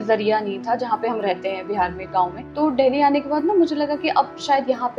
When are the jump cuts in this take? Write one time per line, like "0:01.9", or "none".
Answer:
0:02.4